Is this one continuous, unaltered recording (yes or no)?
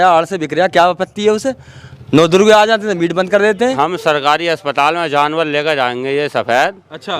no